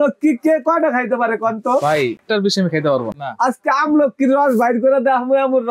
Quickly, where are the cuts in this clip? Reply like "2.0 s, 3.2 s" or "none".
2.2 s, 3.1 s